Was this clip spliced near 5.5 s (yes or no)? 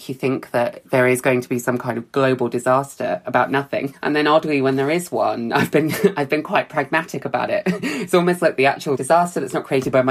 no